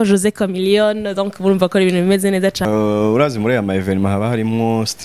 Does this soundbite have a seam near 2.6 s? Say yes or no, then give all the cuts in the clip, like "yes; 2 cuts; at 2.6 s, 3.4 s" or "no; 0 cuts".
yes; 1 cut; at 2.6 s